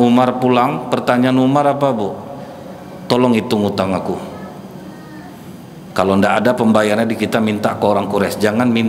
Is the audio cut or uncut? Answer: uncut